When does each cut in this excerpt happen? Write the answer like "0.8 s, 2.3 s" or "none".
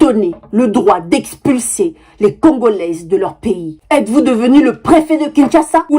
3.7 s